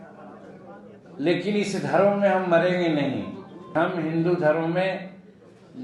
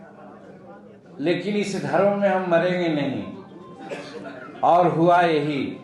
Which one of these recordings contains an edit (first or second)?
first